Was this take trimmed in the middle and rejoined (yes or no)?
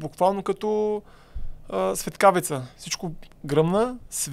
no